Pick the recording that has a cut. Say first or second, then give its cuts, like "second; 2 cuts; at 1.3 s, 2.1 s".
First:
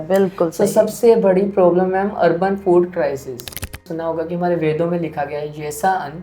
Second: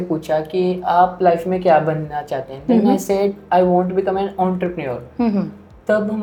first; 1 cut; at 3.5 s